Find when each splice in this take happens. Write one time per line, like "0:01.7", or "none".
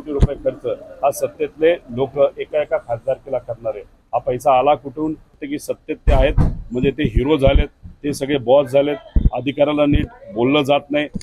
0:05.4